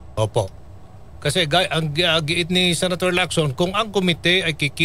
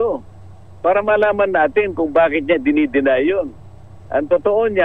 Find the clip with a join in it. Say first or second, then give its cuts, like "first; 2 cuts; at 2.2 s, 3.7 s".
first; 1 cut; at 3.7 s